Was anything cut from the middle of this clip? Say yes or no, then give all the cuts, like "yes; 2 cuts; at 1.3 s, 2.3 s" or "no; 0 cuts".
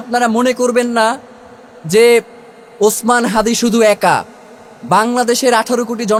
no; 0 cuts